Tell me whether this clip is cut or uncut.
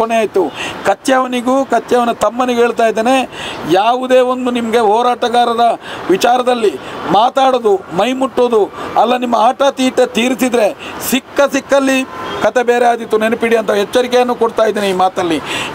uncut